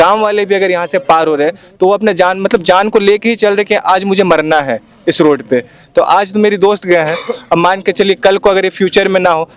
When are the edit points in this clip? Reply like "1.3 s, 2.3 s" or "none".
none